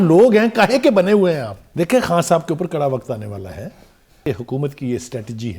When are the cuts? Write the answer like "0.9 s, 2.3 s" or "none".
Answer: 1.6 s, 4.2 s